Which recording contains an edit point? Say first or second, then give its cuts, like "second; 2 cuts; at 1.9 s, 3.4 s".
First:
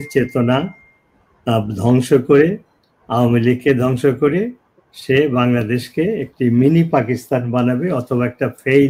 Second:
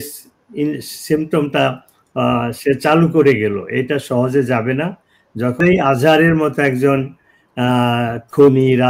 second; 1 cut; at 5.6 s